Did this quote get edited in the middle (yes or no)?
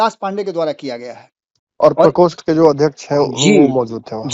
no